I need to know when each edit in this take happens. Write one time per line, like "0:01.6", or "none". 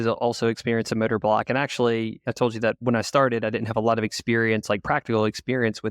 0:02.2